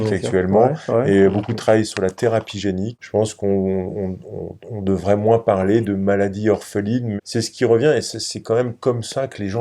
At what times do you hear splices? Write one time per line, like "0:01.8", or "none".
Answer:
0:02.9
0:07.1